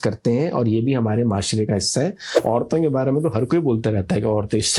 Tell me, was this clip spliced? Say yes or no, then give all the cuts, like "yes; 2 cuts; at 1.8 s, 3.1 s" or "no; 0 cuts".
yes; 1 cut; at 2.3 s